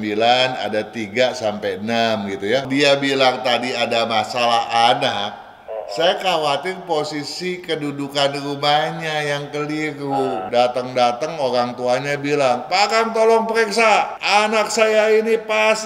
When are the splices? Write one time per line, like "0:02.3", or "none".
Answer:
0:02.6
0:10.4
0:14.2